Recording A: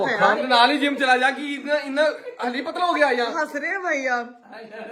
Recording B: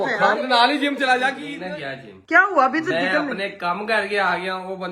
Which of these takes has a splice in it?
B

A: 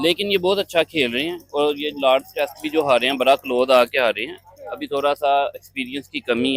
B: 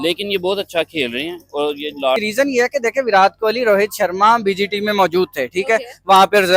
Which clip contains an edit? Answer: B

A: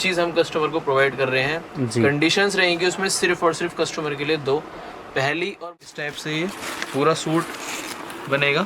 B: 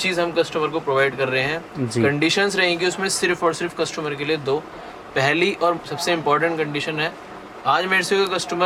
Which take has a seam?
A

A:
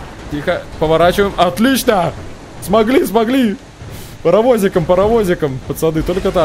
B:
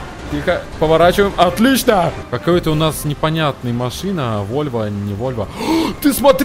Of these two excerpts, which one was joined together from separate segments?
B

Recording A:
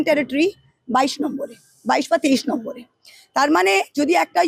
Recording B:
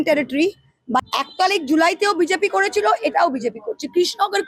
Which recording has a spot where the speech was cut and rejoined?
B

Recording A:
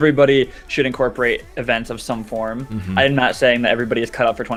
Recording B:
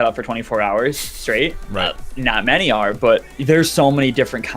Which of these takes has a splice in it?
B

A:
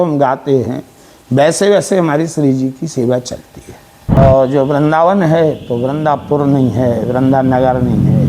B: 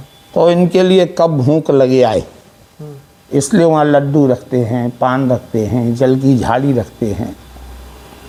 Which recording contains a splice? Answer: A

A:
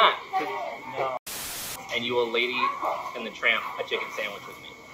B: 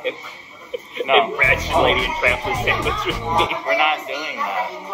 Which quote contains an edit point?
A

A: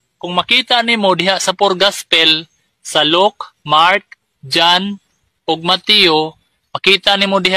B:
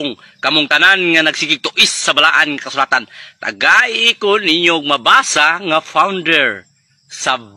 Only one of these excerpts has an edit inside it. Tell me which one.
B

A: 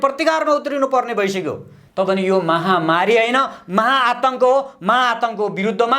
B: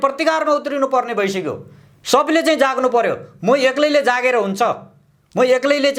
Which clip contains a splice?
A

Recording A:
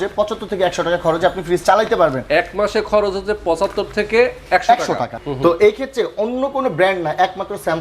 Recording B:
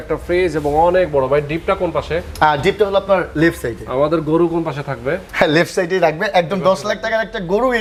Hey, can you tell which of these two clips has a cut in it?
A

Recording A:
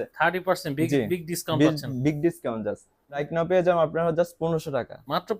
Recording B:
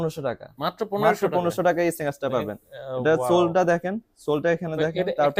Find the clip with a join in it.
A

